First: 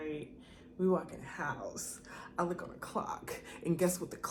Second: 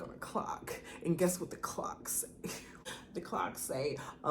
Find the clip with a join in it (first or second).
second